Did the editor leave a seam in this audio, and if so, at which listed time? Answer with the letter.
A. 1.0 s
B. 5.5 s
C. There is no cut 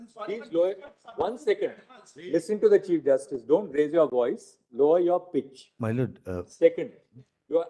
C